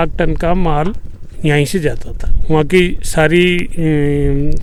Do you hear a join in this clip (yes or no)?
no